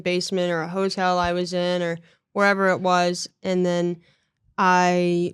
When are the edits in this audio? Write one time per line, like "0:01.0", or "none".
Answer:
0:03.3